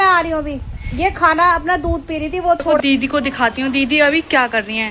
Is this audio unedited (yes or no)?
no